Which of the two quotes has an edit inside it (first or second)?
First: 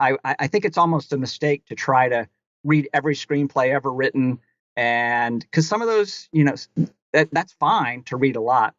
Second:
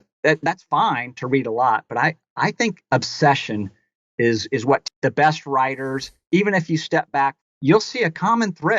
second